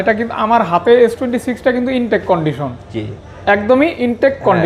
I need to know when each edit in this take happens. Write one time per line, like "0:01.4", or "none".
none